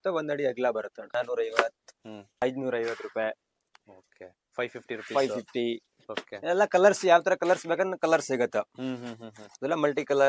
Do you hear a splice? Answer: yes; 2 cuts; at 1.1 s, 2.4 s

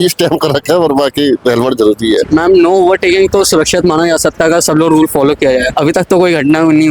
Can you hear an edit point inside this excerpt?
yes; 2 cuts; at 2.3 s, 5.7 s

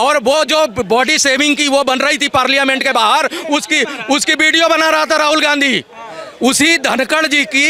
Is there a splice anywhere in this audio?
no; 0 cuts

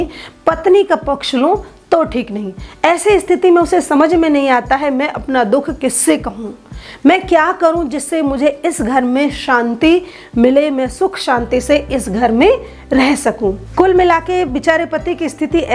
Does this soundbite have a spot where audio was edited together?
yes; 1 cut; at 13.6 s

